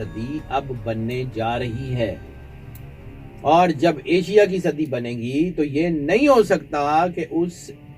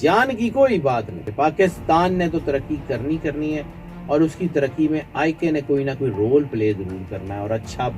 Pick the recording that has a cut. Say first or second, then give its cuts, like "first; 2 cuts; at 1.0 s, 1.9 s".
second; 1 cut; at 1.2 s